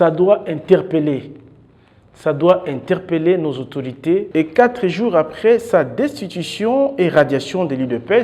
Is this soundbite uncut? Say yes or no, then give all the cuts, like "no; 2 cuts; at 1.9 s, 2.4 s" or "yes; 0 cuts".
no; 1 cut; at 4.3 s